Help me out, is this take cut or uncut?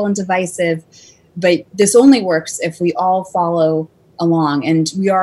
uncut